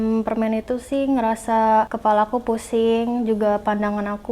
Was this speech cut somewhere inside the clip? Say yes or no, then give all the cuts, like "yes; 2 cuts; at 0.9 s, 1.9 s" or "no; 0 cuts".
yes; 1 cut; at 1.9 s